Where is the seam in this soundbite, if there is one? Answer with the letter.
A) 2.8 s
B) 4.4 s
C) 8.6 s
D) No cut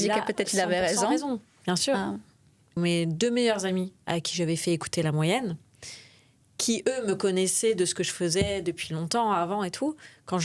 A